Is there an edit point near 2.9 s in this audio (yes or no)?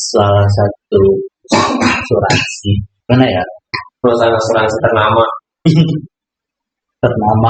yes